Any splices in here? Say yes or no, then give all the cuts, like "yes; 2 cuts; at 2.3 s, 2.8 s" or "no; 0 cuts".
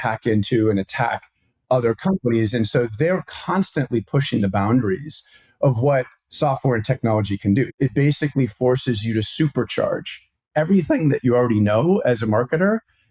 yes; 1 cut; at 7.7 s